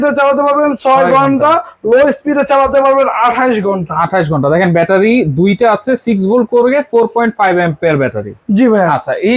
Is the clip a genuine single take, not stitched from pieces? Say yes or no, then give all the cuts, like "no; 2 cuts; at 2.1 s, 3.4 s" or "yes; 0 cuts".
yes; 0 cuts